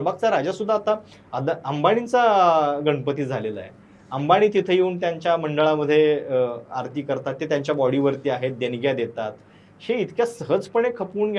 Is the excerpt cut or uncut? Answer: uncut